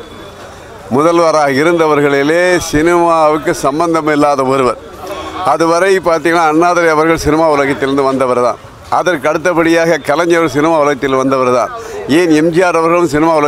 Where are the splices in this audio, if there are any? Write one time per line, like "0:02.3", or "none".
none